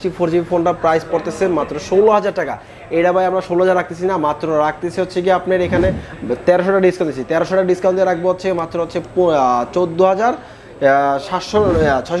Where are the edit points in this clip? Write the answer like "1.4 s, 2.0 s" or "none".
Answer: none